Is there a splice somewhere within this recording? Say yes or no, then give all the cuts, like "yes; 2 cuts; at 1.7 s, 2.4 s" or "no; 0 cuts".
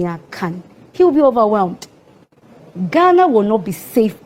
no; 0 cuts